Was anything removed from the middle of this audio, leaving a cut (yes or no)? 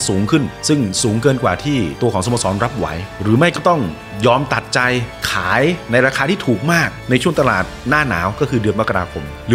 no